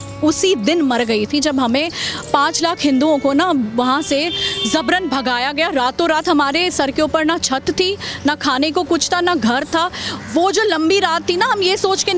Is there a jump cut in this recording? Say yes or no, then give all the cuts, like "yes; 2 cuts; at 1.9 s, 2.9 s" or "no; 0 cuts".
no; 0 cuts